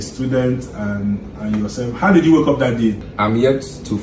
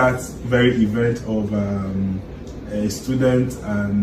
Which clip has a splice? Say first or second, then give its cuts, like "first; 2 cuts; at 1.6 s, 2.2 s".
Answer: first; 1 cut; at 3.1 s